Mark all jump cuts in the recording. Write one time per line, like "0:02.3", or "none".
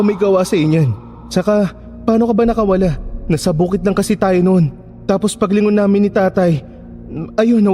0:01.5
0:03.1
0:04.8